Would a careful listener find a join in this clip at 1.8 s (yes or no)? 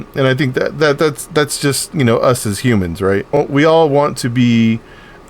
no